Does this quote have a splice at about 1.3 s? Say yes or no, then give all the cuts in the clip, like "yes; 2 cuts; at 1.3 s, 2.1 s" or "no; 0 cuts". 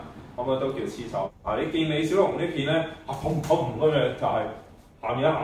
yes; 1 cut; at 1.3 s